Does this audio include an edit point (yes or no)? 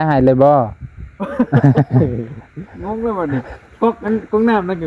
no